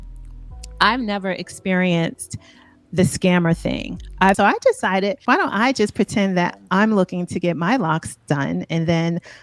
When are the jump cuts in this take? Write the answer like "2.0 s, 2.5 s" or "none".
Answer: 4.4 s